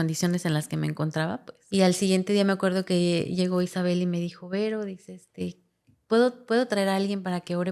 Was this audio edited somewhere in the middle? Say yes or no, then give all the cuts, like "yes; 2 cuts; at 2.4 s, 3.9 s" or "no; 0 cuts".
yes; 1 cut; at 1.5 s